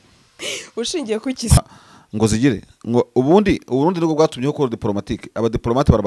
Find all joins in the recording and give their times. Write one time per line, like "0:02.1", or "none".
0:01.6